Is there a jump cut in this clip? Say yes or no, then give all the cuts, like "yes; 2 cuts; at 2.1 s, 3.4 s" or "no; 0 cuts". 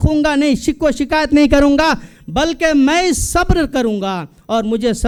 no; 0 cuts